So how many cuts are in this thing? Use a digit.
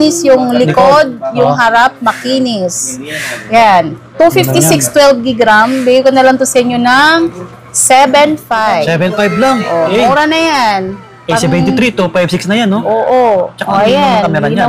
0